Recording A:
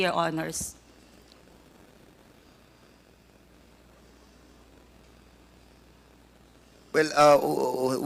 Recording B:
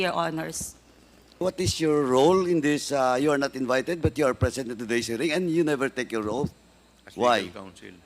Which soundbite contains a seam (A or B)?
B